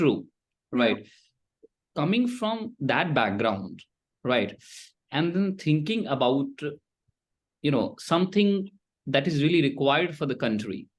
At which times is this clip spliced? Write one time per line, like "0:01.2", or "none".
none